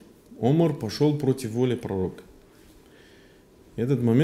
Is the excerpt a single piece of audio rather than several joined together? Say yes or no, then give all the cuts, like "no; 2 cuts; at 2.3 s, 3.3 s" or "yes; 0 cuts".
yes; 0 cuts